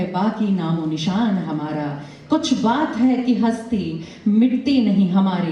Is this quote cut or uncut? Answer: uncut